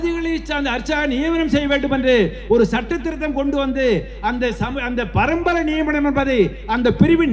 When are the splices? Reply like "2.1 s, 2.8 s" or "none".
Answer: none